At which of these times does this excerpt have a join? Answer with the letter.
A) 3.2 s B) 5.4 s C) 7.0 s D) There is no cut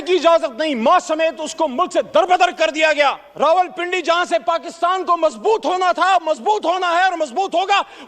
A